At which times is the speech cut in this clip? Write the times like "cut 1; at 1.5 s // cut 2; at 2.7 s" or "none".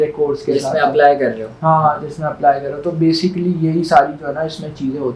none